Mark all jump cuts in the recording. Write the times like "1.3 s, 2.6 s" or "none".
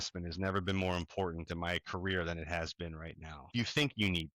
3.4 s